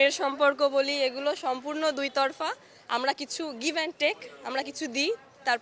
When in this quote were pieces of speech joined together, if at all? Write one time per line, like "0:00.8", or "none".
none